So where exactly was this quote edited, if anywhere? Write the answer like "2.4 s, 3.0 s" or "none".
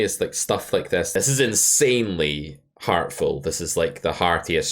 1.1 s